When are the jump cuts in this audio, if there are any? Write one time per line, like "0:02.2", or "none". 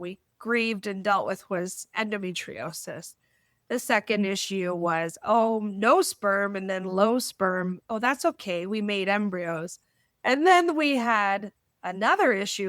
0:01.9